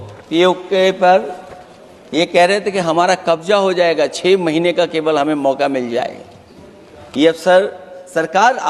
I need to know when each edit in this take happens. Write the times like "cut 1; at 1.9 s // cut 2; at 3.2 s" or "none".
none